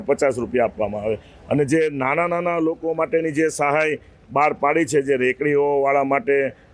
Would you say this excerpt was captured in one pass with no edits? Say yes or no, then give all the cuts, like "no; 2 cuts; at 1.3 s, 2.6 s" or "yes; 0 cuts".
yes; 0 cuts